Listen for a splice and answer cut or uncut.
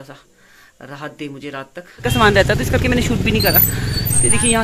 cut